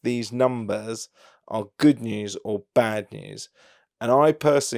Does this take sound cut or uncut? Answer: uncut